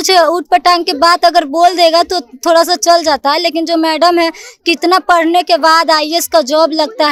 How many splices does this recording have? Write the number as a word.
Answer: zero